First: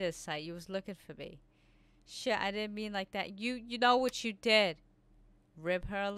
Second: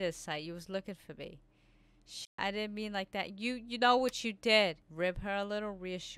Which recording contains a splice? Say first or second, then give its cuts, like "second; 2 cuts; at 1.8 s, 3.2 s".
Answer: second; 1 cut; at 4.8 s